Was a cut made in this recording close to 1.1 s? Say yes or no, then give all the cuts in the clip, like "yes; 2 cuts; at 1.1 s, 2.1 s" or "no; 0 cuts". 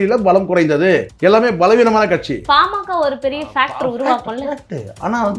yes; 2 cuts; at 1.1 s, 2.4 s